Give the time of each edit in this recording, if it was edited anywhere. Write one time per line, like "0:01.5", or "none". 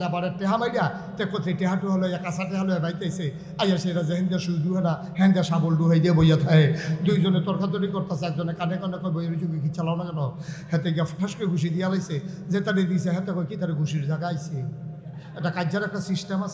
none